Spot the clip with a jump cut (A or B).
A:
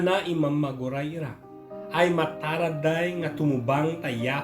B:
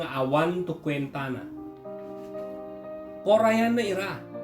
B